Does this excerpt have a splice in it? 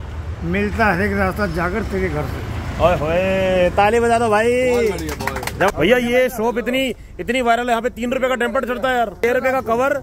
yes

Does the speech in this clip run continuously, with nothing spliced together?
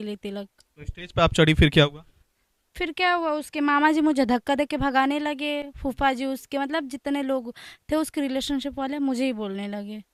yes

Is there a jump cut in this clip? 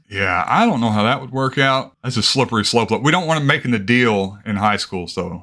yes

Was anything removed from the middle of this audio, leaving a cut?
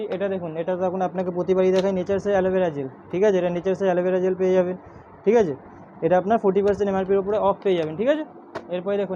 no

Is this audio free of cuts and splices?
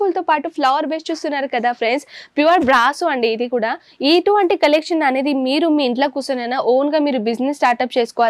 yes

